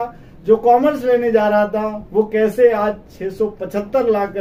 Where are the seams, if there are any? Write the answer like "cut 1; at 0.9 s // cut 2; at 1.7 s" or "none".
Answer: none